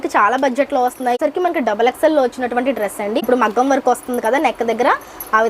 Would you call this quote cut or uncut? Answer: cut